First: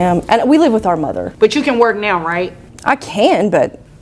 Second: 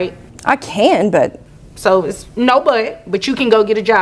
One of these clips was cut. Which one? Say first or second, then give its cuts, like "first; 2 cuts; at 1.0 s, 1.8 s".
first; 1 cut; at 1.3 s